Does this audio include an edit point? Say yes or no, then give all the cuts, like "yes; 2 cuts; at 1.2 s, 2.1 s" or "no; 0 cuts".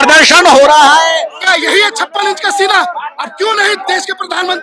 yes; 1 cut; at 1.3 s